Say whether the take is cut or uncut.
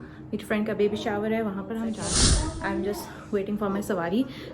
cut